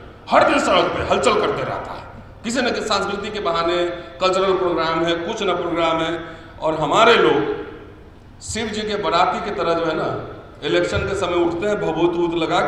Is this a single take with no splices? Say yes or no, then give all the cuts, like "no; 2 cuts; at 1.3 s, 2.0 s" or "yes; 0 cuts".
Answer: yes; 0 cuts